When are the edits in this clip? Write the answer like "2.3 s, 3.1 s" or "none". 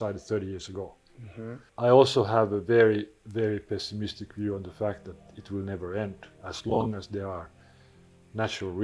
1.6 s